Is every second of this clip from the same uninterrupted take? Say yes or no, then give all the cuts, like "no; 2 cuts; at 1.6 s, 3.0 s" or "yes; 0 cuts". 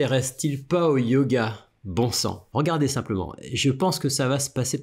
no; 1 cut; at 2.4 s